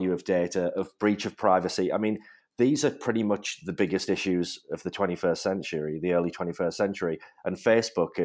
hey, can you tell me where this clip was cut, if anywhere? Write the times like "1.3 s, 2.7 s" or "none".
none